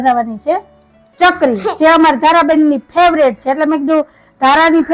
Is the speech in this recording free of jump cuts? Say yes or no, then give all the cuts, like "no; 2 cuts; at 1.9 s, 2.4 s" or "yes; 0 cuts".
yes; 0 cuts